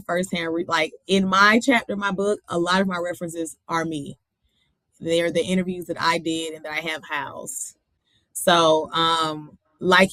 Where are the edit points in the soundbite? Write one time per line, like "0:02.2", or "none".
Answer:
none